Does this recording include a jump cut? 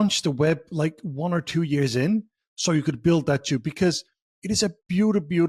no; 0 cuts

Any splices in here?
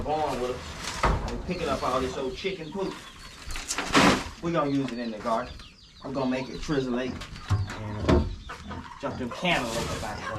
no; 0 cuts

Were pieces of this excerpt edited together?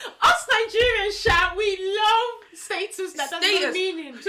no; 0 cuts

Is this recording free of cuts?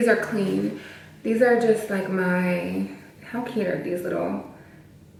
yes; 0 cuts

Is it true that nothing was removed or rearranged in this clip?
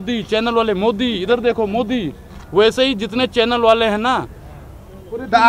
yes; 0 cuts

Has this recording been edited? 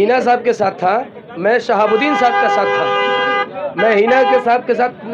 no; 0 cuts

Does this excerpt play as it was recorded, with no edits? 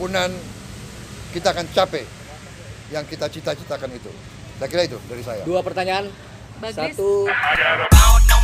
no; 1 cut; at 7.4 s

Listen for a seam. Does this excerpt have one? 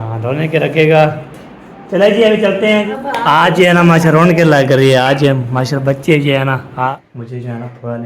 yes; 2 cuts; at 2.9 s, 7.0 s

